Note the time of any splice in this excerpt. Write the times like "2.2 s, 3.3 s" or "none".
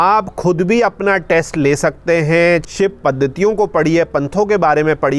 2.7 s